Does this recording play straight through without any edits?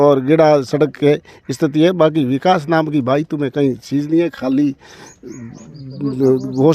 yes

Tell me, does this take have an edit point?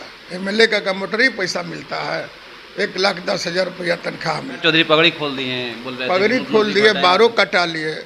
yes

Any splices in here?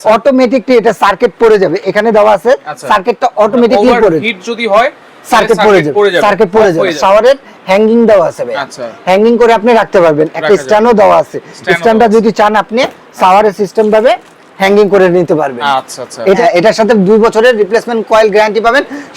yes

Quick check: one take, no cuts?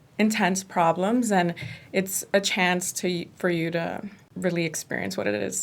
no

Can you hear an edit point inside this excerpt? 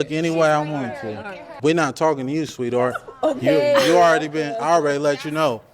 yes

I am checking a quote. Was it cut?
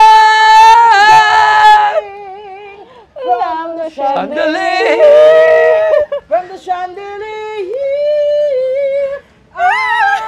no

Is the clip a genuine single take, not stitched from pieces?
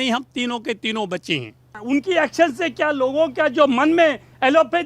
no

